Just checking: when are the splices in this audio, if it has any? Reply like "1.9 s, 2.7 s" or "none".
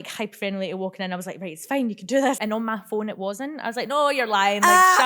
2.4 s